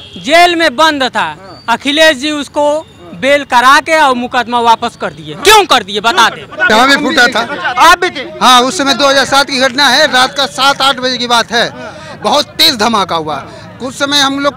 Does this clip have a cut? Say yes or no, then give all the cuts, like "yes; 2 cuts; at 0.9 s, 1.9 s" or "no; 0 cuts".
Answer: yes; 1 cut; at 6.6 s